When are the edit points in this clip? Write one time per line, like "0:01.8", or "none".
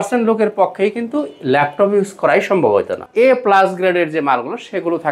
0:03.0